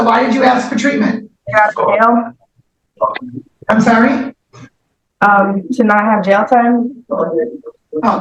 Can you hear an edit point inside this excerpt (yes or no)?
yes